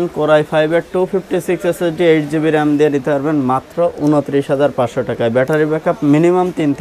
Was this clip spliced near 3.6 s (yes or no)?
no